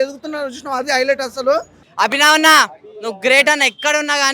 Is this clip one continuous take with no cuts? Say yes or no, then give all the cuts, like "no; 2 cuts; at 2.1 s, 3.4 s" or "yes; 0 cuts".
no; 1 cut; at 1.8 s